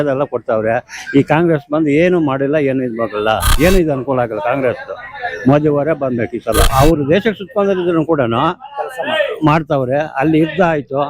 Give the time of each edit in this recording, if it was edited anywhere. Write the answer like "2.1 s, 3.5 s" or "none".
3.5 s, 6.7 s

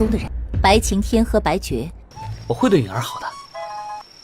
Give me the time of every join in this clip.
2.0 s

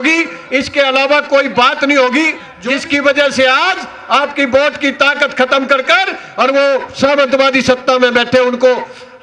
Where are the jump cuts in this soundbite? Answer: 2.4 s

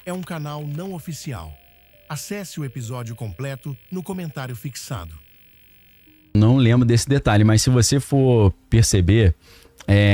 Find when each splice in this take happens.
6.3 s

